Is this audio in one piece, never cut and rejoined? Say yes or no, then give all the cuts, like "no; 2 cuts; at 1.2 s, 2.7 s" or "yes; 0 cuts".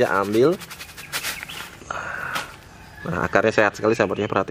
yes; 0 cuts